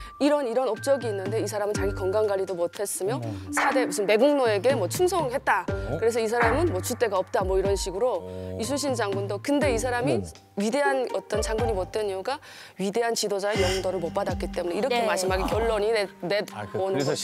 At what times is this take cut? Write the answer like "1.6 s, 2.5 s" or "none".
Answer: none